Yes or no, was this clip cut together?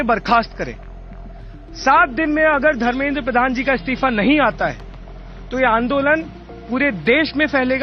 no